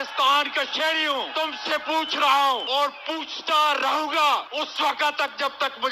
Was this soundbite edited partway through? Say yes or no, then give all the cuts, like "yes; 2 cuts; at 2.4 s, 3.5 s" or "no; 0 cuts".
yes; 3 cuts; at 1.3 s, 2.6 s, 4.5 s